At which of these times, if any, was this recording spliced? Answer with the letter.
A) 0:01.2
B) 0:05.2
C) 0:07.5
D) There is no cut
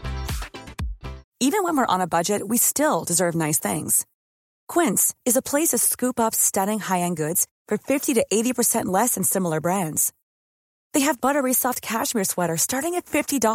A